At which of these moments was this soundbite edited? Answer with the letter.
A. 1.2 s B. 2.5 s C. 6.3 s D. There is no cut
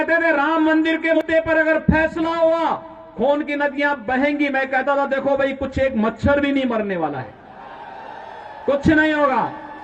A